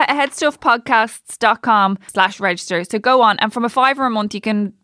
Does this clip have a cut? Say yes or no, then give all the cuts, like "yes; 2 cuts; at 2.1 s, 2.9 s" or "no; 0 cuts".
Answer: yes; 1 cut; at 2.0 s